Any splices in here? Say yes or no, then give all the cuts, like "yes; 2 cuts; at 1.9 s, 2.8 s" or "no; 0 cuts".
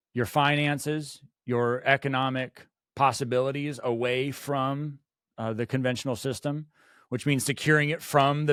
no; 0 cuts